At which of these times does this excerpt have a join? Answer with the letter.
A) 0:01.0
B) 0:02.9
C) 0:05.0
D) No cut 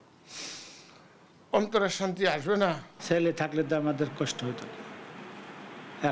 B